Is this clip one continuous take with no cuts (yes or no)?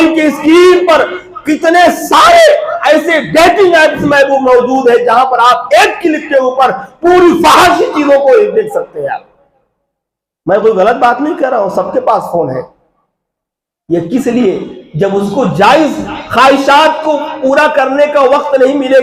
yes